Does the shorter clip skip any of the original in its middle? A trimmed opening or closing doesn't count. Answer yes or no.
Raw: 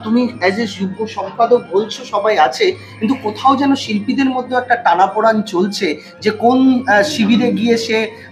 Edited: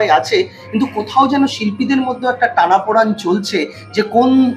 no